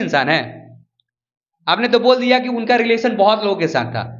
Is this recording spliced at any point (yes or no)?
no